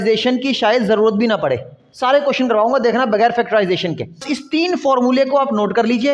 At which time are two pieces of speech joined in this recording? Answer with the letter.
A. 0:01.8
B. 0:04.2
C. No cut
B